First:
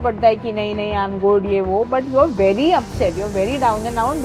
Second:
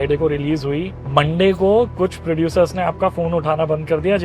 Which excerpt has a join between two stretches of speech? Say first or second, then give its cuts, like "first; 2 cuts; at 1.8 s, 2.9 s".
second; 1 cut; at 1.0 s